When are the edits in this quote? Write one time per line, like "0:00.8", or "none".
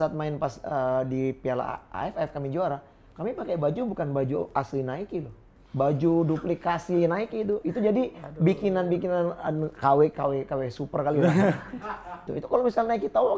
0:12.3